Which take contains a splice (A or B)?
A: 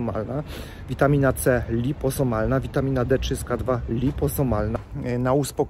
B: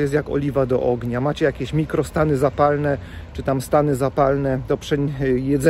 A